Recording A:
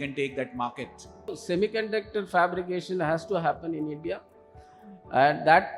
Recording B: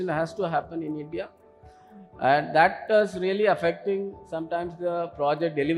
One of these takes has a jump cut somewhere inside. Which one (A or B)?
A